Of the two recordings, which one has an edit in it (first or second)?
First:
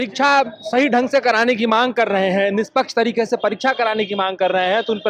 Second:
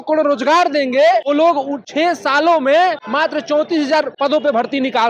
second